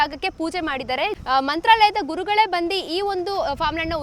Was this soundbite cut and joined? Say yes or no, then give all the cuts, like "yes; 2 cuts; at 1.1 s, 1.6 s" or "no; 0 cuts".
yes; 1 cut; at 1.2 s